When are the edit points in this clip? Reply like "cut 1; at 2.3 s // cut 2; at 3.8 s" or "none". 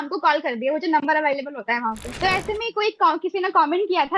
cut 1; at 2.1 s